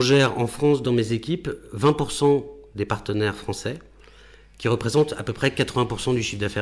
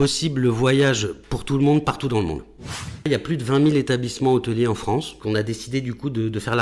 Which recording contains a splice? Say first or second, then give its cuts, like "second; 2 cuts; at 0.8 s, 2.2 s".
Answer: second; 2 cuts; at 3.1 s, 5.1 s